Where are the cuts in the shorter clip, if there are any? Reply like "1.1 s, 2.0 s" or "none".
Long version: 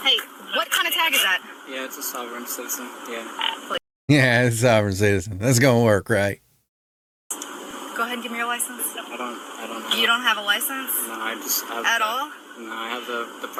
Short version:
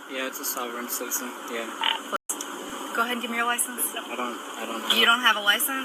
2.1 s

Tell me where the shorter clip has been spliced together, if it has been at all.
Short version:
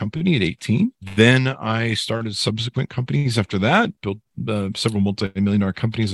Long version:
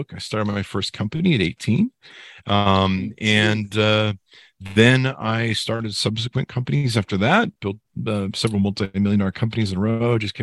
1.0 s

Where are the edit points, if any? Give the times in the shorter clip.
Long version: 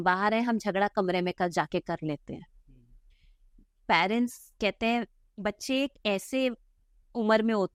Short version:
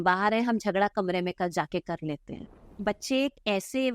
2.6 s

